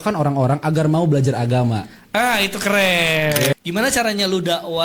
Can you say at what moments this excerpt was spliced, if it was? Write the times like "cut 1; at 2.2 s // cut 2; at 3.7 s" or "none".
cut 1; at 3.5 s